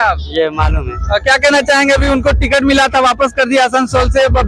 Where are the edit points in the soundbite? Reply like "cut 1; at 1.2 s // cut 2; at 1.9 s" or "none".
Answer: none